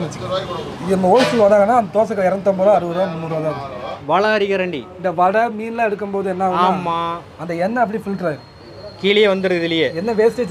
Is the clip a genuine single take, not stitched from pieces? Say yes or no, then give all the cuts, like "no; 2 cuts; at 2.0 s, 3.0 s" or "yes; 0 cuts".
no; 1 cut; at 3.9 s